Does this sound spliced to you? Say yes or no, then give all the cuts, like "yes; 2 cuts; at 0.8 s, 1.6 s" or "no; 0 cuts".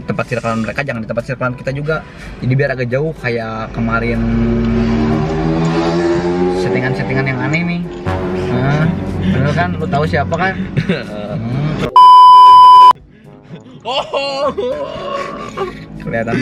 no; 0 cuts